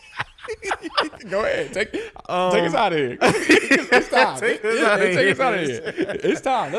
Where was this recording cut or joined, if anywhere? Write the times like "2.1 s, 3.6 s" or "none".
1.2 s